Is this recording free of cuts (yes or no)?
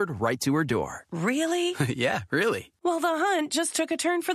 yes